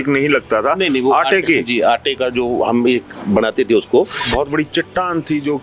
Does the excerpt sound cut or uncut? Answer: cut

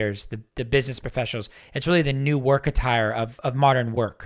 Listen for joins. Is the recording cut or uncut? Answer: cut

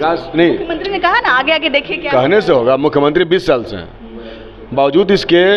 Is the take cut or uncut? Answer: uncut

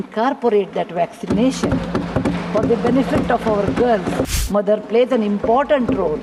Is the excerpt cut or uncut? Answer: cut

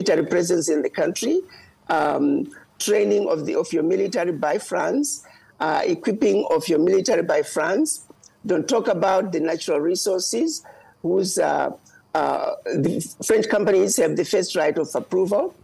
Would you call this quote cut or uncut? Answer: uncut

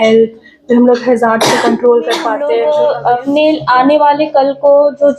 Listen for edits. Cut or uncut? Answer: cut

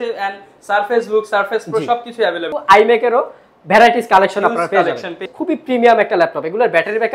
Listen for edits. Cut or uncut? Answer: cut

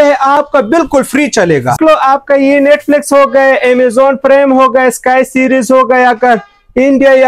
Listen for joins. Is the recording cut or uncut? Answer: cut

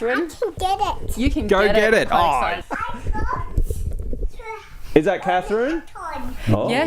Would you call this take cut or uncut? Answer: cut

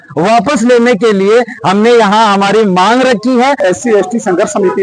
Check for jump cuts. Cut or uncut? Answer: cut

